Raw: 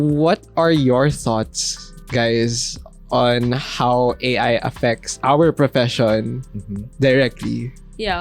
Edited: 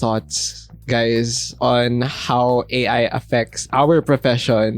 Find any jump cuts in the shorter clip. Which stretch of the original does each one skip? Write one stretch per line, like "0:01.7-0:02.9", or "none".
0:02.7-0:02.9